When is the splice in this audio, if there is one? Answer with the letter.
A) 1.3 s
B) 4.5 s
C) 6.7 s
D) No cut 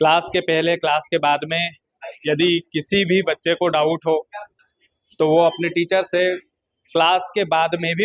D